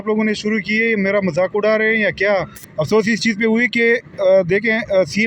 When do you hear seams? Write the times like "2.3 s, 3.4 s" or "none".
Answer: 2.6 s